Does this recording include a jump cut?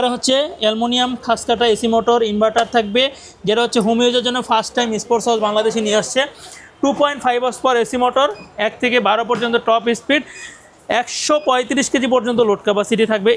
no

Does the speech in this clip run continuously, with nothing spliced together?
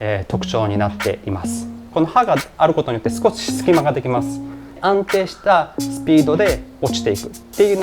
no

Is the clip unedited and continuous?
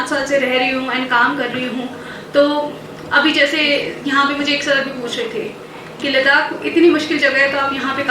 yes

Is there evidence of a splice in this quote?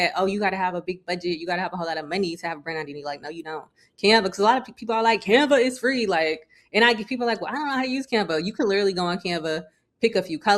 no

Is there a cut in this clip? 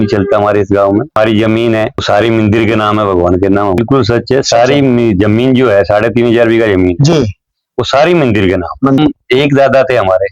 yes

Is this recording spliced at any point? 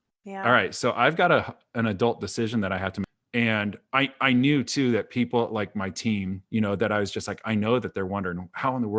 yes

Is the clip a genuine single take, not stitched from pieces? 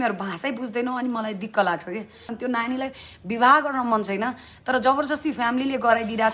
no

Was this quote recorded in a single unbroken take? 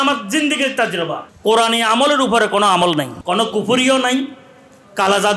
no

